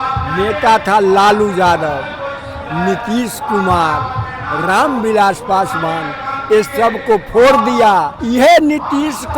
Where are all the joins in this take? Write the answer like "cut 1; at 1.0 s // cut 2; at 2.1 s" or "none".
cut 1; at 8.2 s